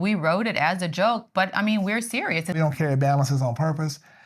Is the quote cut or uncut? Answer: cut